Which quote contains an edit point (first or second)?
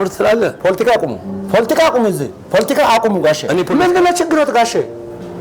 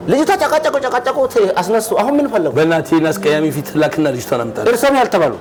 first